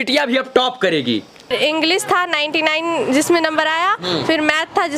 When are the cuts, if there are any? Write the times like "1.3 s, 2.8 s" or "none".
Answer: 1.5 s